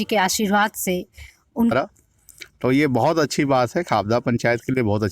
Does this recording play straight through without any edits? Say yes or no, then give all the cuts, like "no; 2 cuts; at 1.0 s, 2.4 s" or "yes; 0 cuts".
no; 1 cut; at 1.7 s